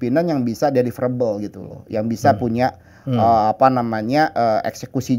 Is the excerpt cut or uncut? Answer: uncut